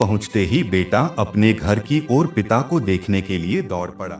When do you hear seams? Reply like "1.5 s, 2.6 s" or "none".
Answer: none